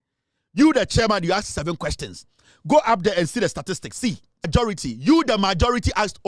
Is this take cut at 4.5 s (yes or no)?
yes